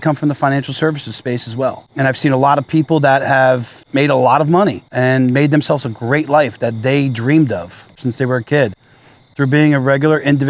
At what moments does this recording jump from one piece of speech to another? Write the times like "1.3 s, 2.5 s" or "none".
1.8 s, 3.8 s, 4.8 s, 7.9 s